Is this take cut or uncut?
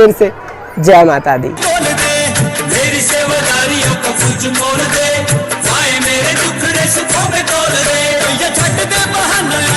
uncut